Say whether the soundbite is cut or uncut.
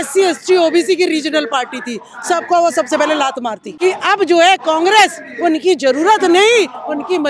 cut